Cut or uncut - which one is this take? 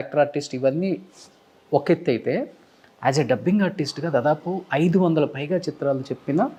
uncut